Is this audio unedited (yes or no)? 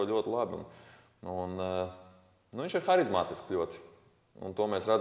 yes